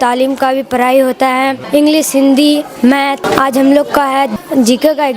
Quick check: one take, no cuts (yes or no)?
no